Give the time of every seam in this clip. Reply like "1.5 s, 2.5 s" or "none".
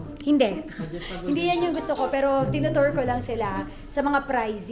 none